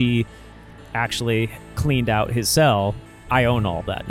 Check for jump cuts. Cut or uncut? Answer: cut